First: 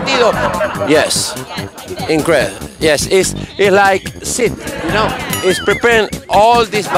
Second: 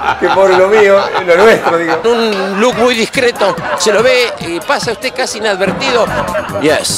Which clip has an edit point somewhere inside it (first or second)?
second